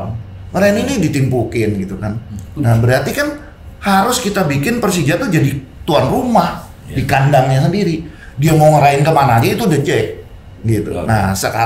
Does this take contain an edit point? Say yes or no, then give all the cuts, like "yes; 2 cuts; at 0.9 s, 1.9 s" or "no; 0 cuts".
no; 0 cuts